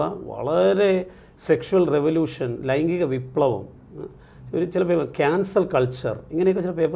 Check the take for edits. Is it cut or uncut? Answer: uncut